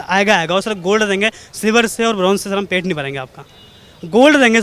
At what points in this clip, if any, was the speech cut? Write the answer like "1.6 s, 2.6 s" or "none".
none